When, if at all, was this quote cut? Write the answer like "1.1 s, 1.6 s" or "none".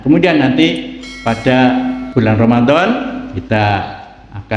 2.0 s, 3.3 s